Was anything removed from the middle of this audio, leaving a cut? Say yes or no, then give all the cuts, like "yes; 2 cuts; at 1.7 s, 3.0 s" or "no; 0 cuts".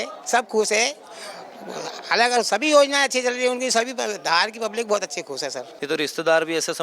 yes; 1 cut; at 5.7 s